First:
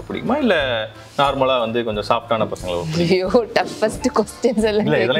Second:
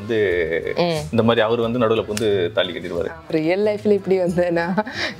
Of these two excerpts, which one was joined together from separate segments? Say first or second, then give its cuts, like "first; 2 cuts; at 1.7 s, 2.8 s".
second; 1 cut; at 3.3 s